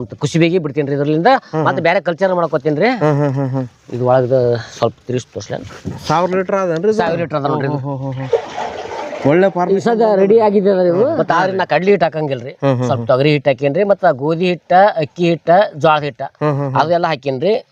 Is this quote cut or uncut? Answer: cut